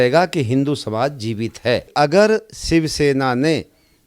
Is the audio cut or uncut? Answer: cut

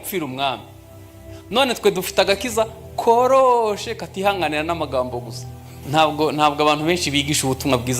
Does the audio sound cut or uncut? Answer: cut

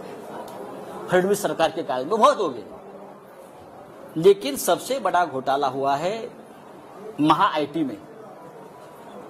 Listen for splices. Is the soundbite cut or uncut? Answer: uncut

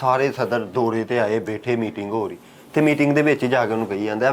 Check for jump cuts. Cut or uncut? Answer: uncut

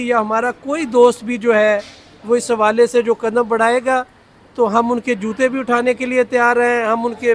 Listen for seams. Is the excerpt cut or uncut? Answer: uncut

